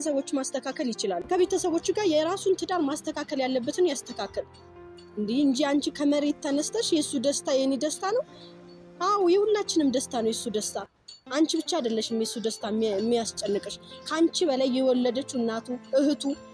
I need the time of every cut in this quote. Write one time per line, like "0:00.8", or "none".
0:01.2